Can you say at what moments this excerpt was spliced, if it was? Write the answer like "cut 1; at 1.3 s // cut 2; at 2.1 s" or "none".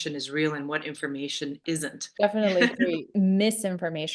cut 1; at 2.0 s // cut 2; at 3.1 s

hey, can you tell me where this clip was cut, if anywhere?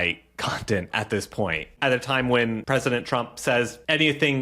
cut 1; at 1.7 s // cut 2; at 2.6 s

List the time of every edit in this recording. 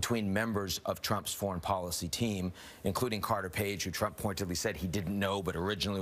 cut 1; at 4.9 s

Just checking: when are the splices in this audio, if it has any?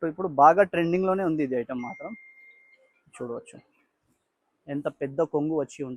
none

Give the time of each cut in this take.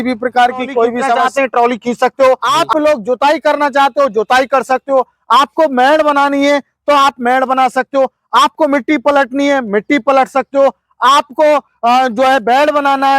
cut 1; at 1.3 s // cut 2; at 2.5 s

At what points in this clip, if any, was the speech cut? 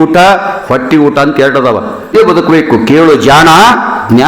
cut 1; at 2.1 s

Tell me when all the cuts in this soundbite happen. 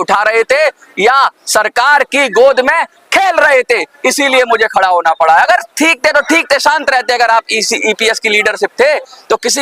none

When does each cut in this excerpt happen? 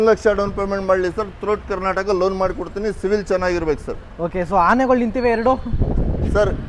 none

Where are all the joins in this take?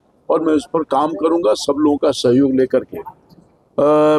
none

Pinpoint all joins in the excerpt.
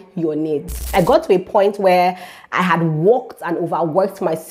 cut 1; at 0.9 s

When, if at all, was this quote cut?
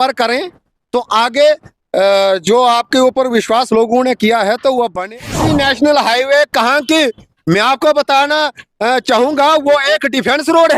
cut 1; at 5.2 s

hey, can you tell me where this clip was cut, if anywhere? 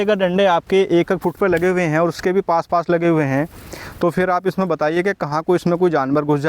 none

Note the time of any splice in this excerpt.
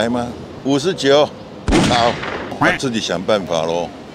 cut 1; at 2.6 s

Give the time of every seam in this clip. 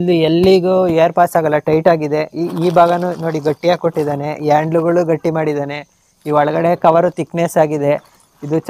none

